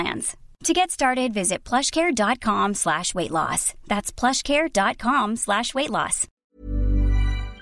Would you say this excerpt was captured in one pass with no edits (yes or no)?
no